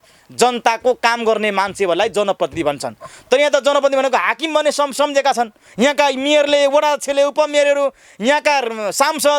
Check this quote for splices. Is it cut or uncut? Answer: uncut